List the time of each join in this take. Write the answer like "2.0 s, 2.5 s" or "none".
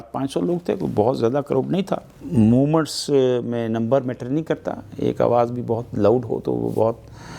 2.1 s